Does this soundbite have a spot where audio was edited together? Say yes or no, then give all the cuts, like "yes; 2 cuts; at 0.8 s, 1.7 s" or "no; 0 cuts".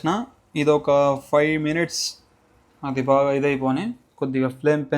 no; 0 cuts